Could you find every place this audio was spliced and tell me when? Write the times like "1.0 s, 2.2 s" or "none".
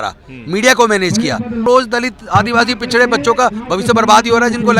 1.6 s